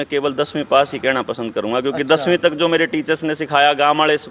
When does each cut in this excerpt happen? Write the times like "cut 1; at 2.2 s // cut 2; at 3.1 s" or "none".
none